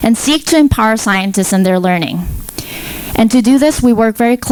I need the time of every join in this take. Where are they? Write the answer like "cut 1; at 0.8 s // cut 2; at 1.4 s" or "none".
none